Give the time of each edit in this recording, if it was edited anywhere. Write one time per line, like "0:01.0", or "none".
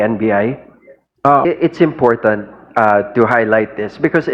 0:01.5